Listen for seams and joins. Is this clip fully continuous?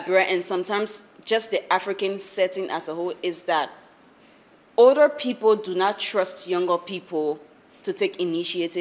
yes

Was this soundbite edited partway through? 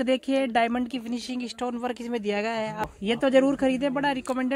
yes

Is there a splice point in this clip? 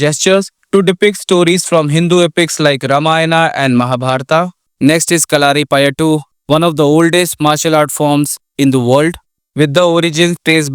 yes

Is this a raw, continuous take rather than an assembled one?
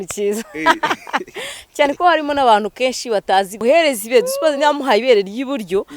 no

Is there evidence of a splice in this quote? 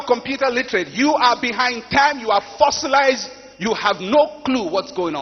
no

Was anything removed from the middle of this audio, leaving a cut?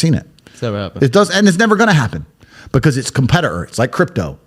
no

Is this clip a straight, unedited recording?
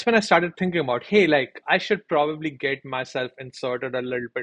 no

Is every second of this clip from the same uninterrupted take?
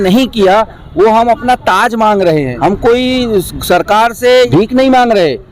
no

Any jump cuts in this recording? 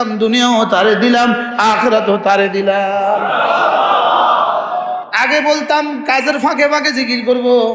yes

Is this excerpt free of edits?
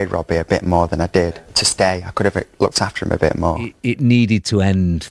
no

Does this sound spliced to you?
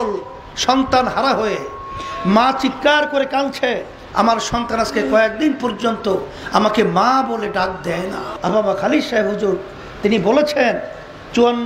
yes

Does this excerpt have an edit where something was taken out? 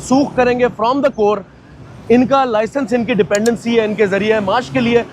no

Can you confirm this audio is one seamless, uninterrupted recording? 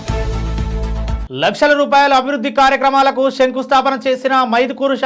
no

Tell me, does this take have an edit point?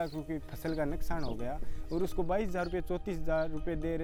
no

